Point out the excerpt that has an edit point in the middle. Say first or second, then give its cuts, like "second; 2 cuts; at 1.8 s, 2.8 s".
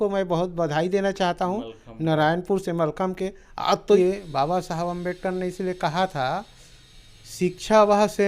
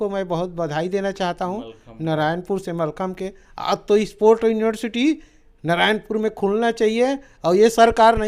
first; 1 cut; at 4.0 s